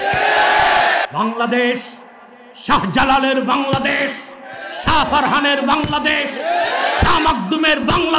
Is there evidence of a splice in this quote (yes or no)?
yes